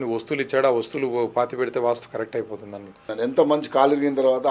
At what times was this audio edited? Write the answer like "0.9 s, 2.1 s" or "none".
3.0 s